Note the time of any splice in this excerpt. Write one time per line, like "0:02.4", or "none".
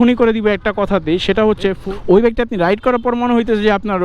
0:01.8

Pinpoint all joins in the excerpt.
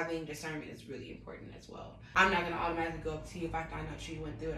0:02.0

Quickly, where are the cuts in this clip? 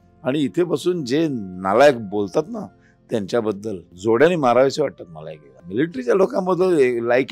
0:03.9
0:05.6

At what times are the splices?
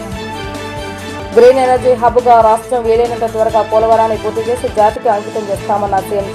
0:00.9

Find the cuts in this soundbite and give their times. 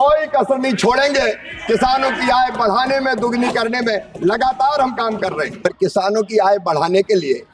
0:05.6

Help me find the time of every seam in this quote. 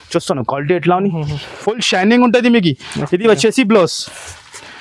none

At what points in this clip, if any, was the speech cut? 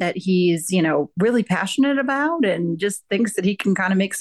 none

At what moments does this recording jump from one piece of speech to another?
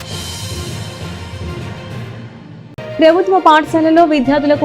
0:02.2

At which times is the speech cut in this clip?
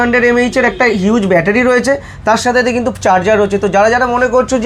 none

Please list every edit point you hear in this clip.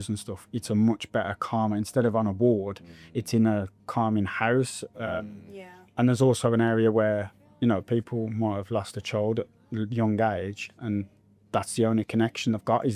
none

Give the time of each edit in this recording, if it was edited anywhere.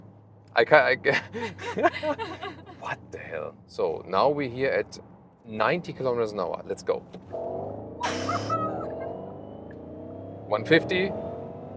0:03.6

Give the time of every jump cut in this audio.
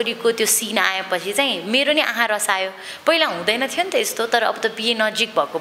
none

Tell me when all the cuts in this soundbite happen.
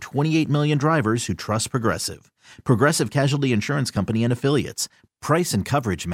none

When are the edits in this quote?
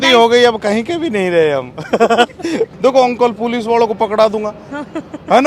0:02.7

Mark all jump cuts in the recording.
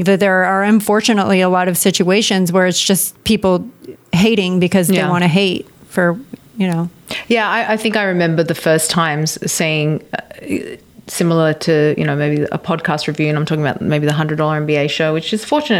0:07.1

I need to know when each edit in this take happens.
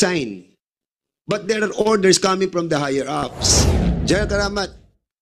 0:03.9

